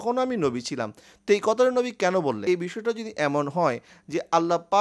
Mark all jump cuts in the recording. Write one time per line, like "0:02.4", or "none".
0:02.4